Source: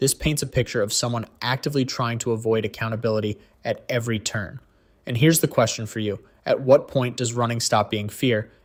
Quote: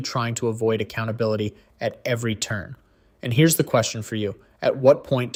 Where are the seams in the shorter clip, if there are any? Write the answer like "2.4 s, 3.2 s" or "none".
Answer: none